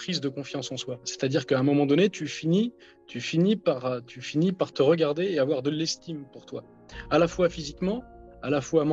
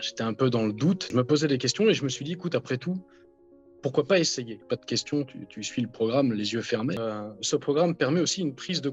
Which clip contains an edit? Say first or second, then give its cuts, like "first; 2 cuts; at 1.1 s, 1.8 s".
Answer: second; 3 cuts; at 1.0 s, 4.6 s, 7.0 s